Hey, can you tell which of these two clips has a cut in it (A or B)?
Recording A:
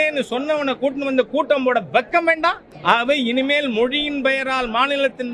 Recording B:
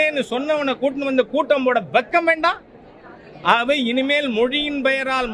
A